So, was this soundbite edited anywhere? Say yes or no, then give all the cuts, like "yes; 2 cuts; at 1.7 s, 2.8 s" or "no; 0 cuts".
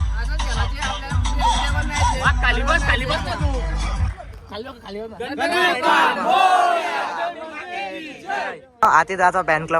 yes; 1 cut; at 8.7 s